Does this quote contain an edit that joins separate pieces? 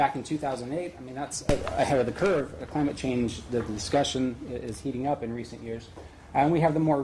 no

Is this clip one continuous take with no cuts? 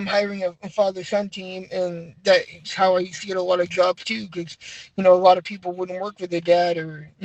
yes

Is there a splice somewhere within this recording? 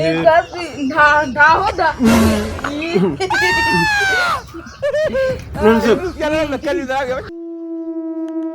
yes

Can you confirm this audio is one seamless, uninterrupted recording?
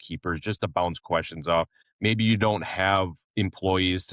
no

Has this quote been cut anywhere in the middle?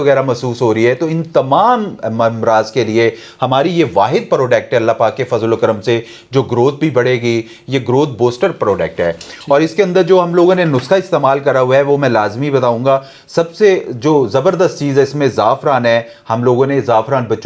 no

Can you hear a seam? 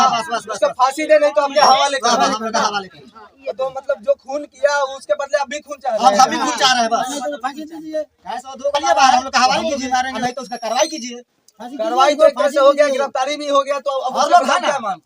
yes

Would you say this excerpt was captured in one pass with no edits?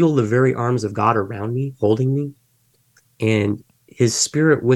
yes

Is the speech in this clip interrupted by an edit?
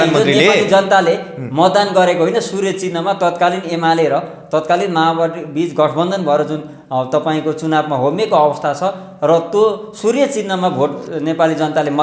no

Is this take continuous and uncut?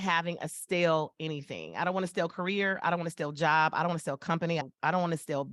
no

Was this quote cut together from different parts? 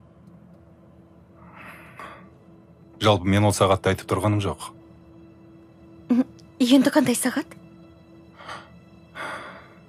no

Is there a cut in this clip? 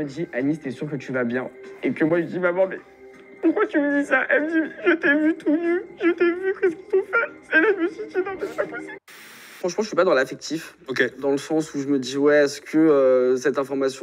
yes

